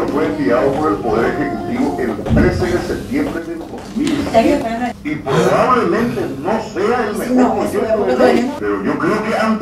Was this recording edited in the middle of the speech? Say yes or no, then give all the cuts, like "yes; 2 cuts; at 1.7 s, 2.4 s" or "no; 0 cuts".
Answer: yes; 2 cuts; at 4.9 s, 8.5 s